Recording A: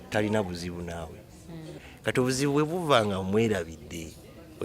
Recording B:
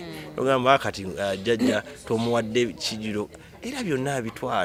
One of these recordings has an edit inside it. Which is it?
A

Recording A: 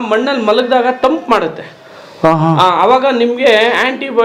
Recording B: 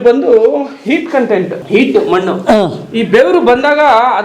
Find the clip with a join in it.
B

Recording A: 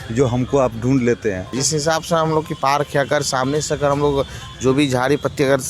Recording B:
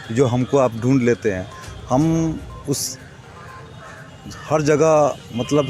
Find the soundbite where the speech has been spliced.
A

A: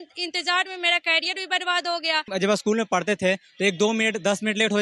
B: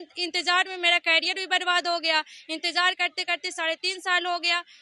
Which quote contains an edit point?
A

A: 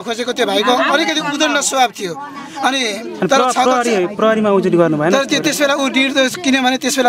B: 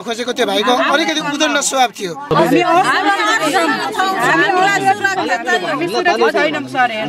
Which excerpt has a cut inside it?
B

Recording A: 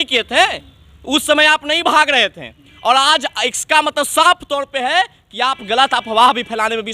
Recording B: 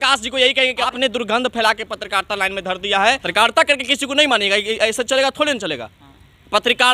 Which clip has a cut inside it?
B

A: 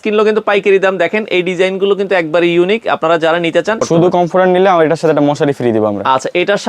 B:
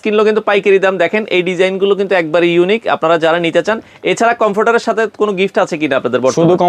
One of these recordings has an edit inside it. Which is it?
A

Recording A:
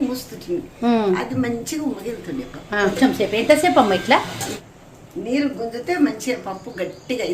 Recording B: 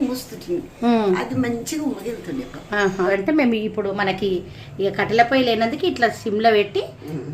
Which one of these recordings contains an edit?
B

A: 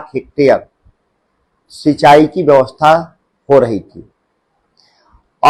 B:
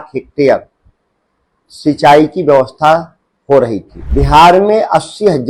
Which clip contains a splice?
B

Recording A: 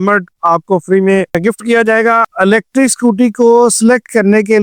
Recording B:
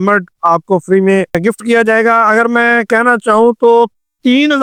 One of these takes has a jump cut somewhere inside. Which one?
A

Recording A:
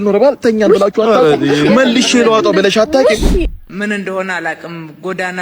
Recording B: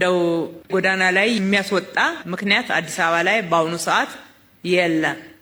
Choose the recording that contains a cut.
A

